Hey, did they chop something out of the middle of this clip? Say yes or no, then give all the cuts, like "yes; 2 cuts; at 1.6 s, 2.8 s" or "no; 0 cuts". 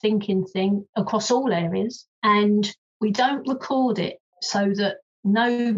yes; 3 cuts; at 2.0 s, 2.8 s, 4.8 s